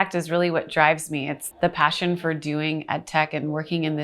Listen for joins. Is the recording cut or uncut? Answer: cut